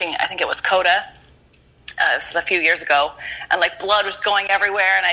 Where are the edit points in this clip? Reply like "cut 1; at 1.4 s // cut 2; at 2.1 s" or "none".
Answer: none